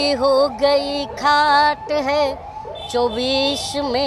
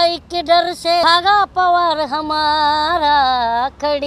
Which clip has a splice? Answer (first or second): second